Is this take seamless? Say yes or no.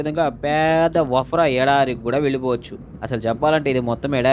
no